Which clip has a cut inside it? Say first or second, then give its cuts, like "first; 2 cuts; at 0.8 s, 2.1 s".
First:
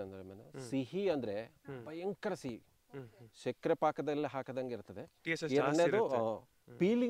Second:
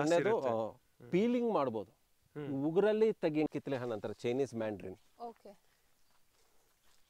second; 1 cut; at 3.5 s